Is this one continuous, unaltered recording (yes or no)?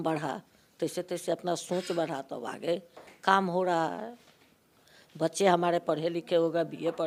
yes